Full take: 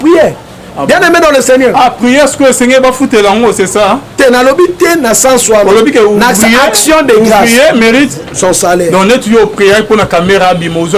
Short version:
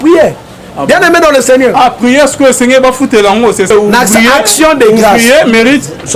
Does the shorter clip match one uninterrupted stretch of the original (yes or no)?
no